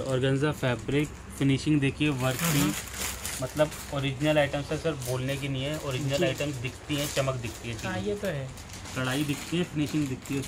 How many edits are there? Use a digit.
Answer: 0